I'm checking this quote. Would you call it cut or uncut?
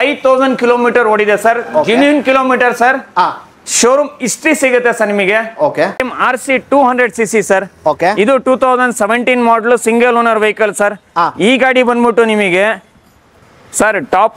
cut